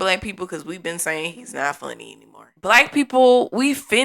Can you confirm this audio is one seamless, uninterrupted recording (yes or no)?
no